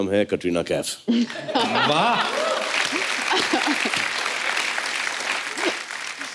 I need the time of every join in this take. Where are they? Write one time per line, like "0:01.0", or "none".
none